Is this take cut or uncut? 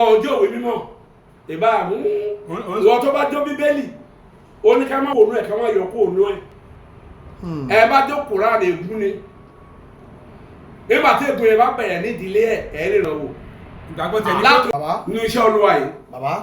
cut